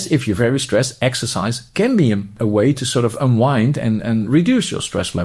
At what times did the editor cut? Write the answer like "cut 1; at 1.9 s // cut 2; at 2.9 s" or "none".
cut 1; at 2.3 s